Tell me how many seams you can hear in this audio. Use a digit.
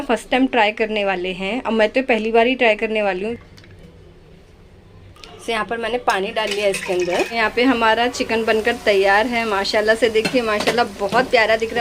2